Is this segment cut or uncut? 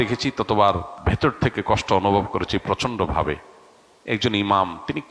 cut